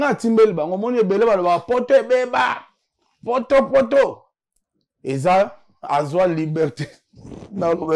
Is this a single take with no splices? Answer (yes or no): yes